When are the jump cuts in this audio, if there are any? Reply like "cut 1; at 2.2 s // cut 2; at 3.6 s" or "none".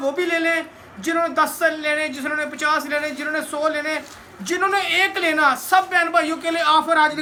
none